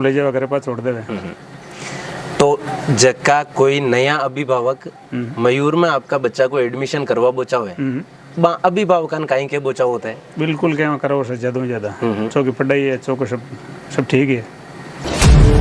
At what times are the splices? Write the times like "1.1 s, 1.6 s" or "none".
none

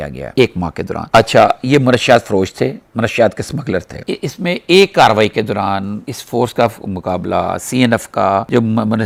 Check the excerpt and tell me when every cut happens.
none

